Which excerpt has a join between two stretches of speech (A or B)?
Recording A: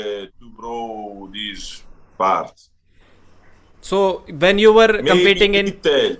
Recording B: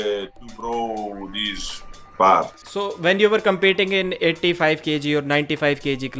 B